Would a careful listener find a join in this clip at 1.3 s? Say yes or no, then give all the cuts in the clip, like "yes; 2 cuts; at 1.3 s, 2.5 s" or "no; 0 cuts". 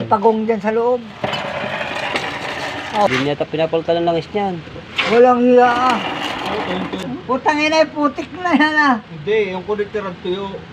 no; 2 cuts; at 3.1 s, 7.1 s